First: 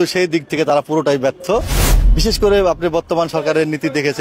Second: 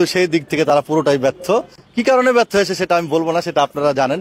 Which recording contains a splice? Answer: first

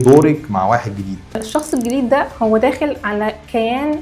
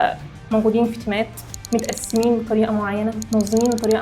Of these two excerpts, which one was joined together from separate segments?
first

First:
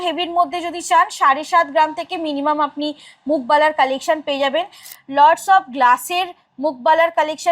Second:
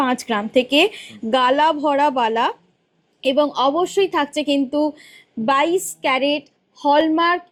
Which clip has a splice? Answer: first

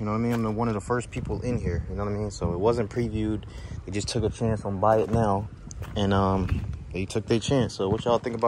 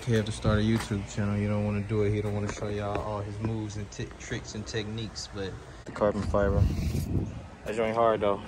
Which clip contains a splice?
second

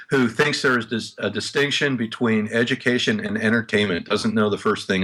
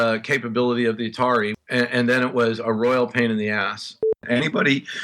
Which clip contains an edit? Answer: second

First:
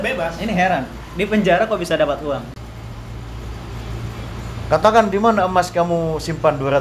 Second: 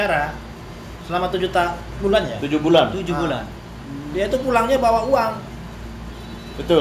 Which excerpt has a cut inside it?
first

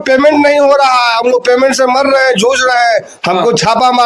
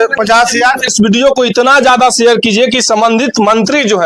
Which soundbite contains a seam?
second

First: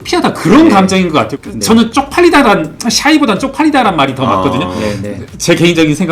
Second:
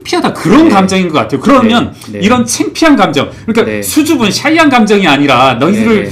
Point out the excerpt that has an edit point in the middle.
first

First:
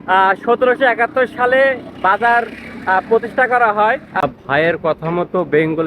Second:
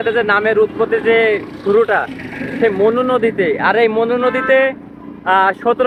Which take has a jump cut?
first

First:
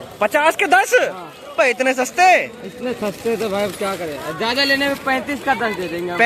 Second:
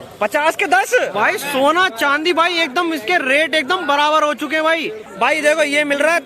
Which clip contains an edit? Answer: second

